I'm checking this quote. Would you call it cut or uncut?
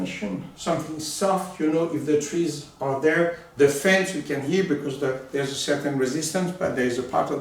uncut